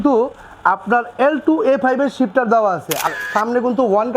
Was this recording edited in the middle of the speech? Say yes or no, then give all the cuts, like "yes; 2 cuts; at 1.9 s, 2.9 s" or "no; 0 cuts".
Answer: yes; 1 cut; at 3.1 s